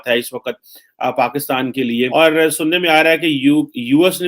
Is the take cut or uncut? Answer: cut